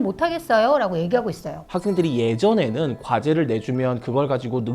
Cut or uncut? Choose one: cut